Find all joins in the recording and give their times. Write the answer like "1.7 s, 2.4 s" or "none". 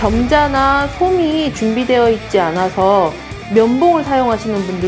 none